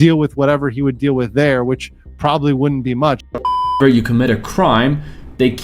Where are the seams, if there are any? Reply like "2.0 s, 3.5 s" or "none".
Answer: 3.6 s